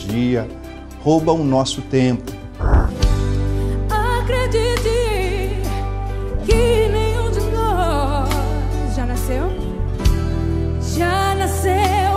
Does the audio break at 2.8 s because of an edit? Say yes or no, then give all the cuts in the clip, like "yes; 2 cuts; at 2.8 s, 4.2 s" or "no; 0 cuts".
yes; 1 cut; at 2.8 s